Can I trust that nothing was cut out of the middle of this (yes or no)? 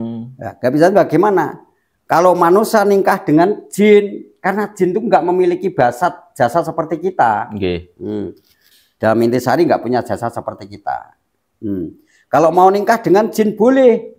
no